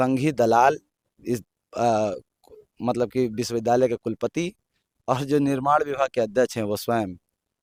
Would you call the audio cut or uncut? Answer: uncut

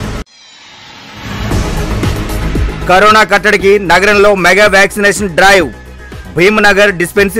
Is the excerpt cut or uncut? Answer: cut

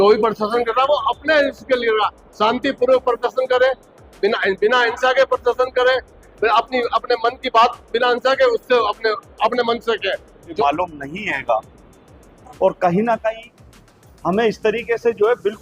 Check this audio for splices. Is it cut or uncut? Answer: cut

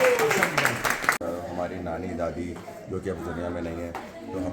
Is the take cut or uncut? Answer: cut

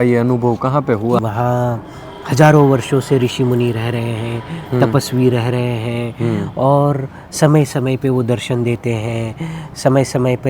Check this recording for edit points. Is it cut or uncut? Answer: cut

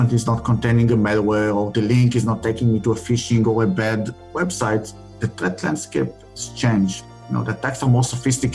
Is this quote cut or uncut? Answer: cut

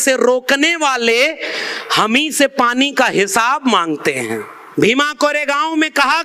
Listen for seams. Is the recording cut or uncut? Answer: cut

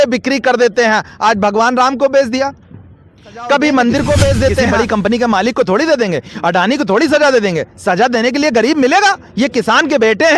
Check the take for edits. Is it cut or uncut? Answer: cut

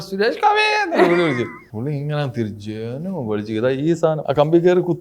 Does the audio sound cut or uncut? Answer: cut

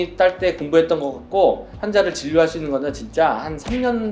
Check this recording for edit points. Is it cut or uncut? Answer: uncut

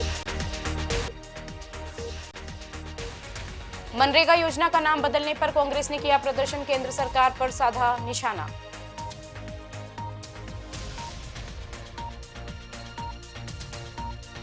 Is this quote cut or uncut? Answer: cut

